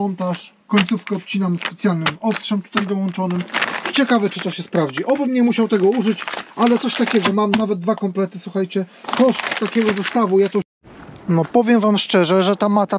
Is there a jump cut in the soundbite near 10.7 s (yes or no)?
yes